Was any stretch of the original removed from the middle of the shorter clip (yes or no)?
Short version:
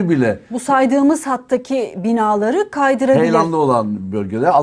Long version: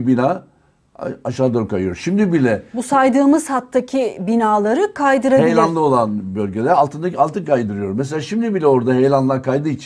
no